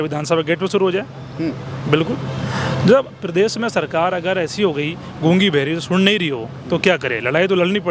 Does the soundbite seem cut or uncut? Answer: uncut